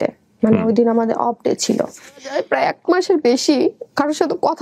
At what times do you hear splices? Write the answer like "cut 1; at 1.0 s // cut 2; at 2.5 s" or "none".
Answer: cut 1; at 2.3 s